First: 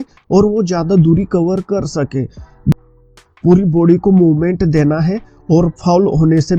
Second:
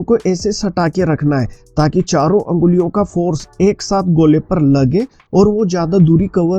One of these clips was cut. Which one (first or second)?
first